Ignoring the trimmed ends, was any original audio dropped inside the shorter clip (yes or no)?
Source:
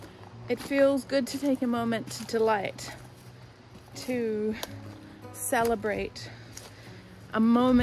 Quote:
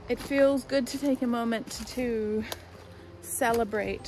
yes